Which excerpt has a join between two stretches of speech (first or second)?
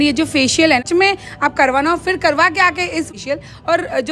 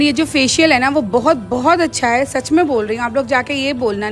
first